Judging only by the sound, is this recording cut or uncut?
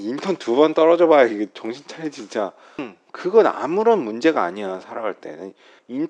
cut